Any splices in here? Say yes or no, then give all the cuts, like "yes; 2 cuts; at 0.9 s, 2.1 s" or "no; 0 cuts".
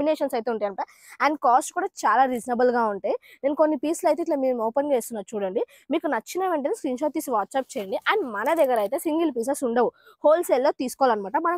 no; 0 cuts